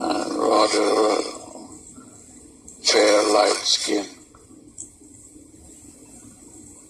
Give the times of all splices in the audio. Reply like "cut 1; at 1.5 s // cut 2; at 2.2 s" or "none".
cut 1; at 2.4 s